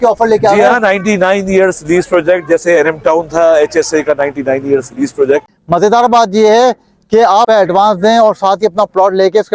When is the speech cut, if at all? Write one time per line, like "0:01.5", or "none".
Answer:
0:05.5